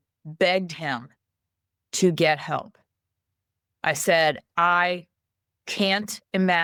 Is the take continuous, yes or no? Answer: yes